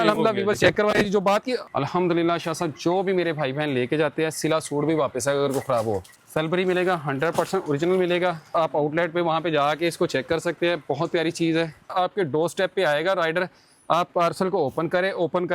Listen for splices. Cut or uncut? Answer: cut